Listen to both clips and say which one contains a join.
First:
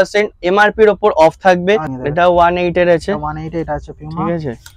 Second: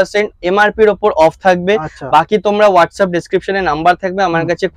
first; 1 cut; at 1.9 s

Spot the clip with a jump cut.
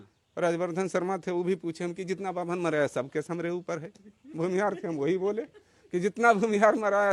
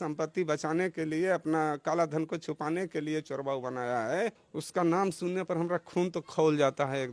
second; 1 cut; at 4.5 s

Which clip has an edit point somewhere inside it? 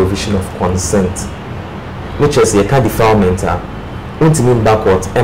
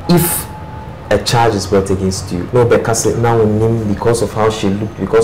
second; 1 cut; at 2.3 s

